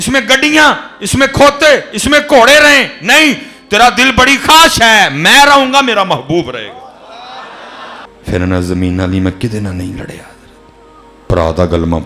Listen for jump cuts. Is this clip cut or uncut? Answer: cut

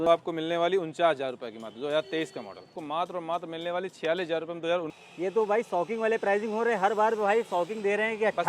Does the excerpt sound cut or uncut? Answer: cut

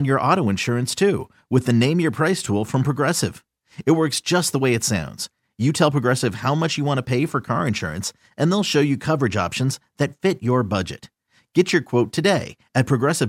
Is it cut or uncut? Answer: uncut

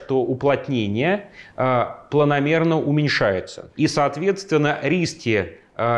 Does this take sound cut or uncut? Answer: cut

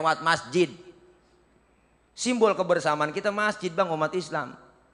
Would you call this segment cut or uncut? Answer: uncut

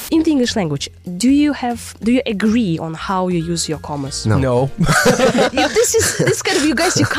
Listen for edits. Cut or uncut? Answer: uncut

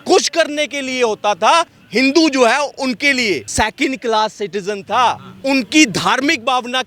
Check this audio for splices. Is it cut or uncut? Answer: cut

